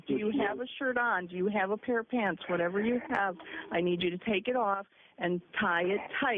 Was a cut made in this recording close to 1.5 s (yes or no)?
yes